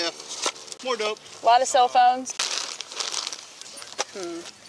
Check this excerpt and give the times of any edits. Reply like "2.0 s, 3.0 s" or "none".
1.2 s, 2.3 s, 3.7 s

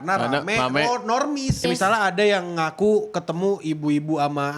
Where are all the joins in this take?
1.6 s

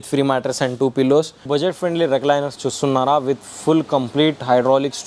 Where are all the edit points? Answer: 1.4 s

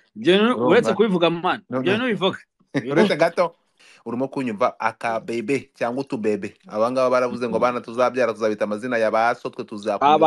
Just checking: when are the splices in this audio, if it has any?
3.7 s

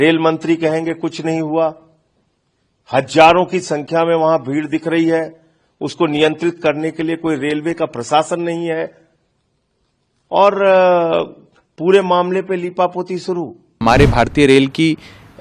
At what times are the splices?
13.6 s

